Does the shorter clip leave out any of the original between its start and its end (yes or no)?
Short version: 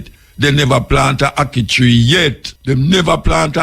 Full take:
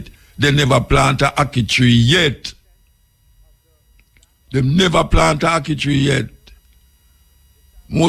yes